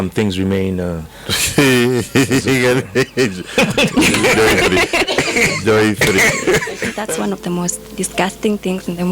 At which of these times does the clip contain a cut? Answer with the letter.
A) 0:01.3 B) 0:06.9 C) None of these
B